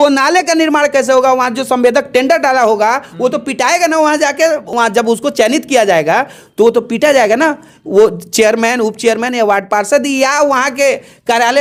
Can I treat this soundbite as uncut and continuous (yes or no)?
yes